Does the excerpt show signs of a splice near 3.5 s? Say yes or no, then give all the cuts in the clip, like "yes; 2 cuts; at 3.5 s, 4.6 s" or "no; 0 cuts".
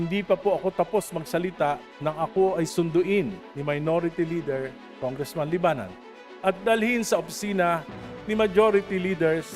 yes; 2 cuts; at 2.7 s, 3.5 s